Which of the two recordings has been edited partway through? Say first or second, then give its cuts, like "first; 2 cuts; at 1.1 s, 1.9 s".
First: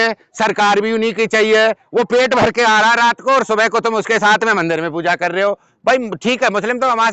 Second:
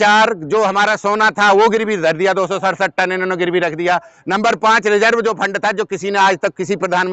first; 1 cut; at 5.7 s